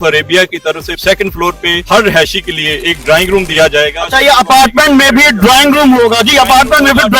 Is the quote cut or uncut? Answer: uncut